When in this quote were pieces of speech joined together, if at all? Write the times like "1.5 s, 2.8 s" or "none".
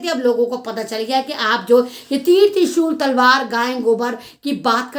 none